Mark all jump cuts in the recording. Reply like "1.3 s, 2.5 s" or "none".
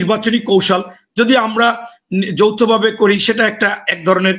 none